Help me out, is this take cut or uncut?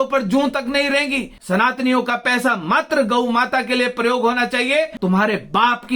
cut